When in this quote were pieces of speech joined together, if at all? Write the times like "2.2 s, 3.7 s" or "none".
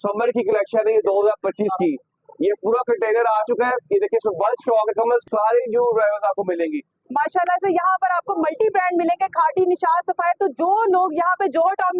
5.2 s, 6.9 s